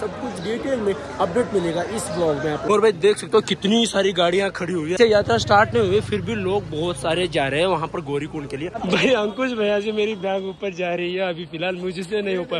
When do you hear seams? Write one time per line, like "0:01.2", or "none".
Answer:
0:02.6
0:05.0
0:08.8